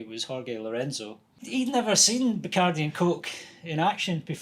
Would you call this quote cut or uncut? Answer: cut